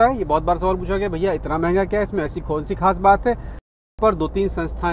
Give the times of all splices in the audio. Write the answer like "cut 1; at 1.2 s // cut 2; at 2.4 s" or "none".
cut 1; at 3.6 s